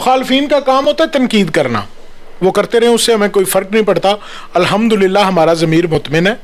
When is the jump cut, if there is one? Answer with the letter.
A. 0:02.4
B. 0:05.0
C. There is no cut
C